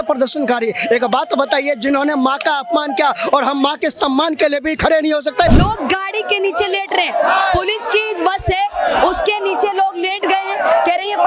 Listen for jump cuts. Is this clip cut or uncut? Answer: cut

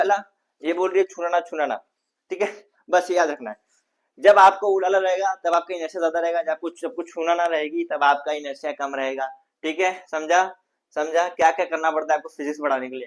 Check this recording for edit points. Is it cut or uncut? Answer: uncut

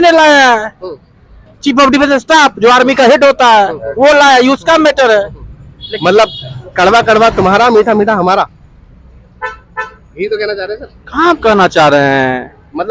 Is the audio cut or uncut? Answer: uncut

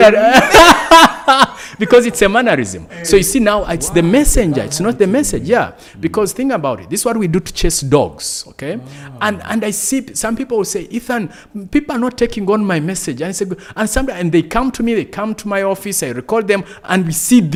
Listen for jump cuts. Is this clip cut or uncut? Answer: uncut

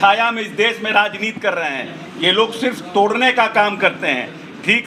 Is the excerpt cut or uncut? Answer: uncut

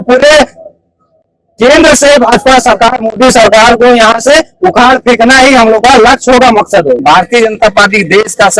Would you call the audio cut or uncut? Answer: cut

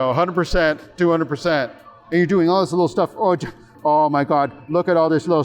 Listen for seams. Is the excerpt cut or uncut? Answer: cut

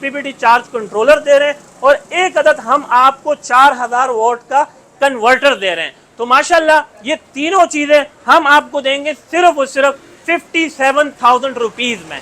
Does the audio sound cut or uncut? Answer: uncut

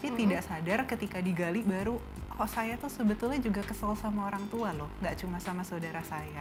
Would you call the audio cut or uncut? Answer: uncut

